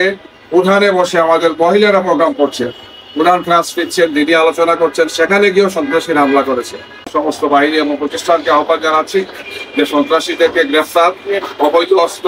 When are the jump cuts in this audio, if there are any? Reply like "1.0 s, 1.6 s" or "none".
7.1 s